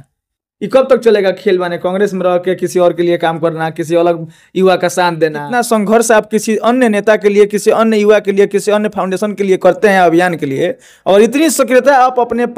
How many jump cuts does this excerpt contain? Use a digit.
1